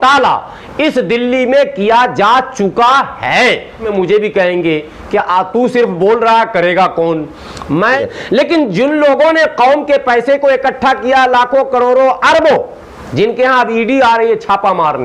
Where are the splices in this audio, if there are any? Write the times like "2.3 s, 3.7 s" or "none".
3.8 s, 8.0 s